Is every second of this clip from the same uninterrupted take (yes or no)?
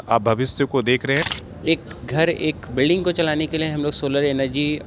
no